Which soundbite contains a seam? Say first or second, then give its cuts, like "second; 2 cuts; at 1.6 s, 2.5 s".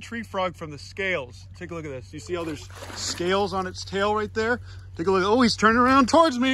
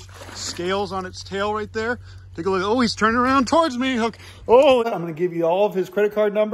second; 1 cut; at 4.9 s